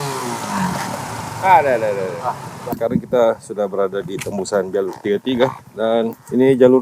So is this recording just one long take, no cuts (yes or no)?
no